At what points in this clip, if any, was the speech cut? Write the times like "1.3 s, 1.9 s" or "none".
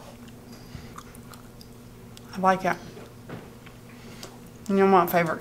0.9 s